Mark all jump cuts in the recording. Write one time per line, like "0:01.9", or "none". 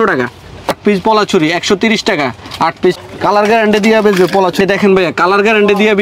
0:03.0